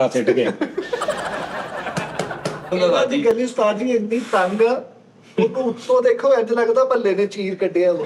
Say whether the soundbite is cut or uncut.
cut